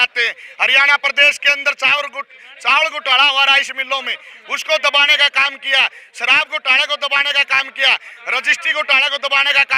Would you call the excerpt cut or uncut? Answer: uncut